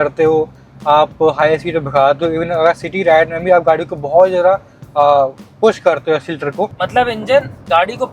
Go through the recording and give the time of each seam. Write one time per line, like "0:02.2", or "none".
0:06.8